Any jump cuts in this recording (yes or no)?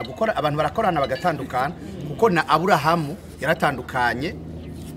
no